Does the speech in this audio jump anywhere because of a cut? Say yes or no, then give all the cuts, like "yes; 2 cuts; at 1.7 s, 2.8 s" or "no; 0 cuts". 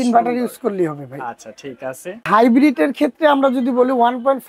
yes; 1 cut; at 2.3 s